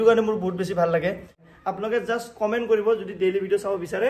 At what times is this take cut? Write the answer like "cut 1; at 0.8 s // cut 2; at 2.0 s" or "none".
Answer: cut 1; at 1.4 s